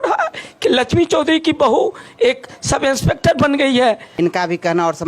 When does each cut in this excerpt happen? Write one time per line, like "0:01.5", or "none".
0:04.1